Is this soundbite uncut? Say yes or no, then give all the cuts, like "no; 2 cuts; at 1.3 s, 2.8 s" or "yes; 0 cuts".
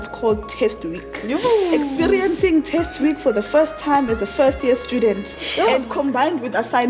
yes; 0 cuts